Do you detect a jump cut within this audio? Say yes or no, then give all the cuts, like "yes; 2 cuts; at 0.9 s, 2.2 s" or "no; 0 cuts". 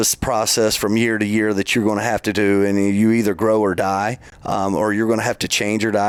no; 0 cuts